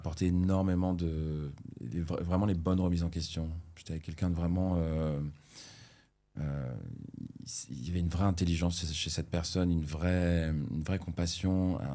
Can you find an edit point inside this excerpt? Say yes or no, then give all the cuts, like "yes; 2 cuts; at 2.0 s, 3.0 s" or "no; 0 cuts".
no; 0 cuts